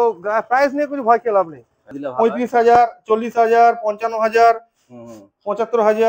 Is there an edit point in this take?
yes; 1 cut; at 2.0 s

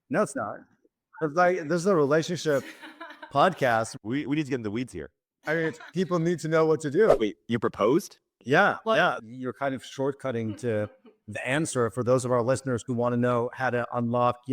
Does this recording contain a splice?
yes; 2 cuts; at 7.1 s, 9.2 s

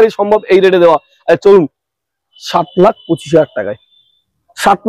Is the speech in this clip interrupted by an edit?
no; 0 cuts

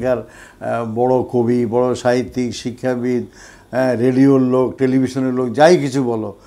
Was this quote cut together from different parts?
no; 0 cuts

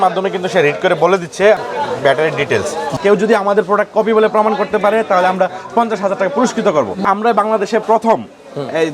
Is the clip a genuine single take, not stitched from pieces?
no; 3 cuts; at 1.6 s, 2.9 s, 7.0 s

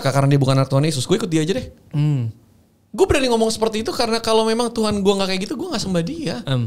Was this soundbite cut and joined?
no; 0 cuts

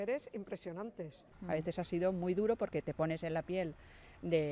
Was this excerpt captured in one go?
no; 1 cut; at 1.3 s

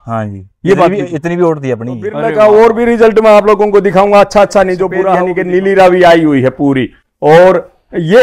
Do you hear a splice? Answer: yes; 2 cuts; at 2.3 s, 5.2 s

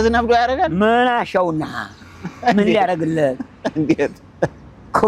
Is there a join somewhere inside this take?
no; 0 cuts

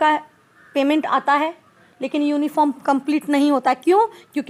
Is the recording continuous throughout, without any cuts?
yes; 0 cuts

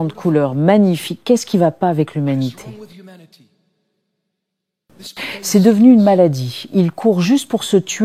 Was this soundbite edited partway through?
yes; 1 cut; at 2.7 s

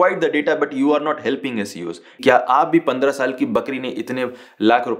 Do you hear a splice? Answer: yes; 1 cut; at 2.1 s

